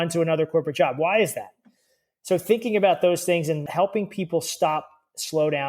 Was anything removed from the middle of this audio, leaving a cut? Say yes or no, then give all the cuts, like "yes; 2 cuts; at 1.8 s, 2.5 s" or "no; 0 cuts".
yes; 1 cut; at 3.6 s